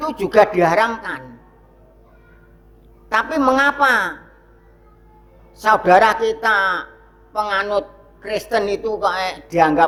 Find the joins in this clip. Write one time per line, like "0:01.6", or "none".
none